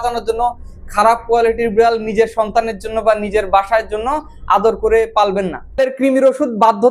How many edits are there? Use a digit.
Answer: 1